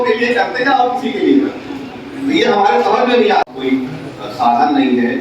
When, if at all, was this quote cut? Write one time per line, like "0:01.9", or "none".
0:03.4

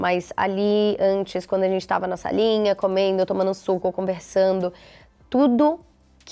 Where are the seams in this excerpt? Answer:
none

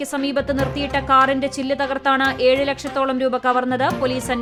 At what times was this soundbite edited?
none

